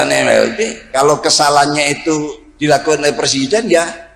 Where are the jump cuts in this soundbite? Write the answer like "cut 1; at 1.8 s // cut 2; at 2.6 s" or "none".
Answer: cut 1; at 2.4 s